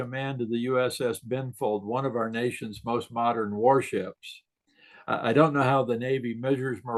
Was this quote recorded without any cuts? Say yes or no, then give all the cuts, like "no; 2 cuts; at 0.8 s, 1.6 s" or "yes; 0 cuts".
yes; 0 cuts